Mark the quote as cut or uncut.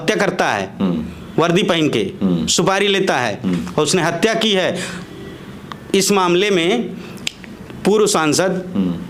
uncut